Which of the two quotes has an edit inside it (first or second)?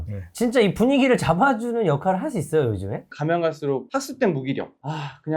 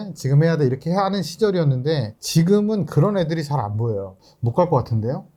first